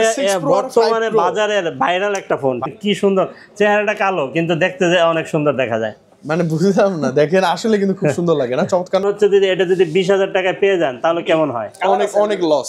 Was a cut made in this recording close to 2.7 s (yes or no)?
yes